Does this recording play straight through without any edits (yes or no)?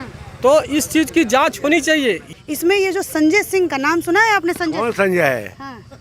no